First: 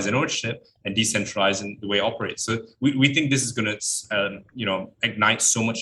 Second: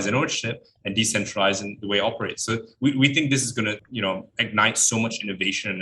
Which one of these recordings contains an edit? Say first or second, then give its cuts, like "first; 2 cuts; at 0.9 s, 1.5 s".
second; 1 cut; at 3.9 s